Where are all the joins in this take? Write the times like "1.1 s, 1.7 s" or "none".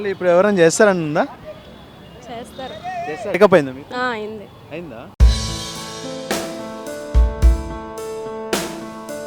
3.3 s